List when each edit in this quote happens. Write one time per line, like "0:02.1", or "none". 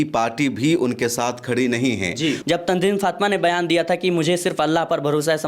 0:02.4